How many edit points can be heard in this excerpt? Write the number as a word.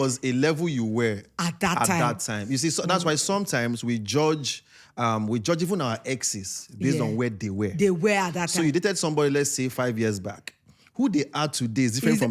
zero